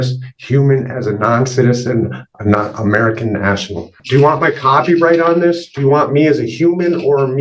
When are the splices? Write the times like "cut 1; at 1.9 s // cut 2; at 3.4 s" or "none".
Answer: cut 1; at 4.0 s